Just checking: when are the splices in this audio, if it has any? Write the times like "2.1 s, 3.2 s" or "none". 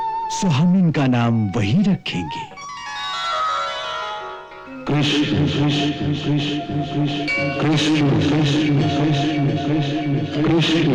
none